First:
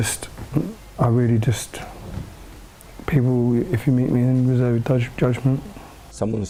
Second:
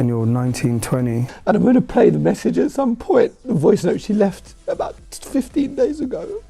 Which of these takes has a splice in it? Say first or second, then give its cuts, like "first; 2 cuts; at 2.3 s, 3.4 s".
second; 1 cut; at 1.3 s